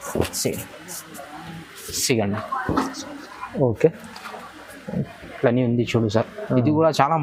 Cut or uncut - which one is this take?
uncut